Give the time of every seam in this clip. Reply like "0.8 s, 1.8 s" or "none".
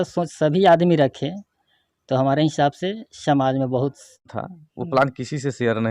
4.5 s